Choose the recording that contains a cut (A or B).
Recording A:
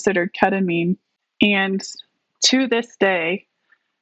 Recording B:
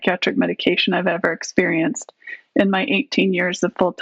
A